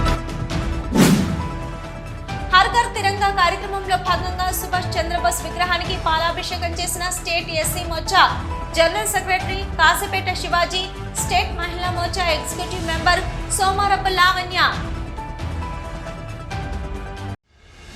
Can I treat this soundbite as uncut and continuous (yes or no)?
no